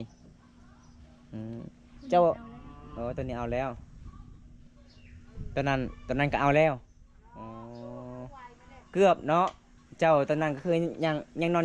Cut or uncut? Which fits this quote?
uncut